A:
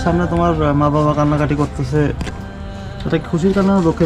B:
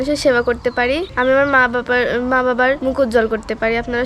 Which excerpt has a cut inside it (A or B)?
B